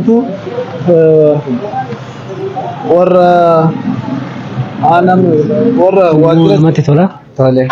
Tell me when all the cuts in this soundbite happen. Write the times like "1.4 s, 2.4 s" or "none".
6.3 s